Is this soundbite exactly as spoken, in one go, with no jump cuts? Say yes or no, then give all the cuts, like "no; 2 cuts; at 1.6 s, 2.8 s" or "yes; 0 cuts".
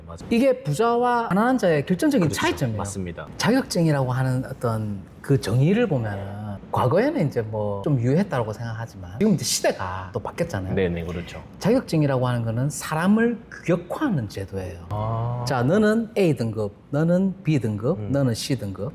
no; 1 cut; at 3.1 s